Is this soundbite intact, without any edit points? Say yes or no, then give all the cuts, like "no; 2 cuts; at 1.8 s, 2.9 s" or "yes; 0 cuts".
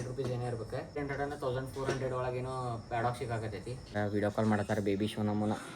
no; 2 cuts; at 1.0 s, 3.9 s